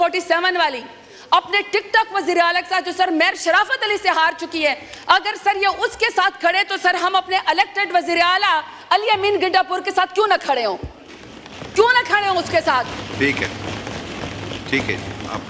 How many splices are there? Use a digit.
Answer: 0